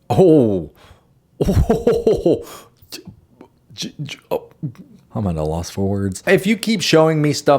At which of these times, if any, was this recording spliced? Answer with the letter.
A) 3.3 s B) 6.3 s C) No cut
B